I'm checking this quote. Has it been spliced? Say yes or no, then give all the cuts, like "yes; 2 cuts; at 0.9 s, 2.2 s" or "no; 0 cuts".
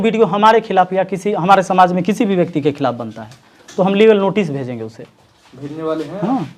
no; 0 cuts